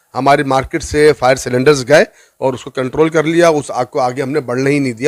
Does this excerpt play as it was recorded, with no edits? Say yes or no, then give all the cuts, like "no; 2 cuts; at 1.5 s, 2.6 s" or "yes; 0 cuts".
yes; 0 cuts